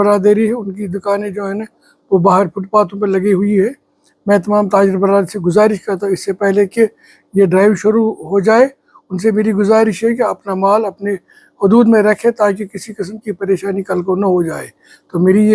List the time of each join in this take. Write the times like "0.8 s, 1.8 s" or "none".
none